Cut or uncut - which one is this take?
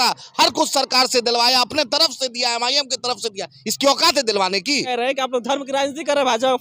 cut